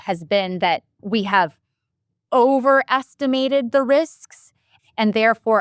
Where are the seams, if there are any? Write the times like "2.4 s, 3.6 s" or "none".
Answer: 1.0 s, 4.7 s